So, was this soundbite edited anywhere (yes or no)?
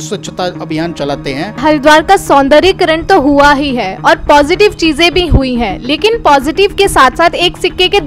yes